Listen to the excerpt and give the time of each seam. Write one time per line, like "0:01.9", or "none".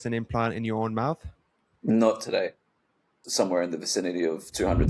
0:03.0